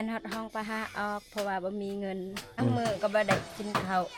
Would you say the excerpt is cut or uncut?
cut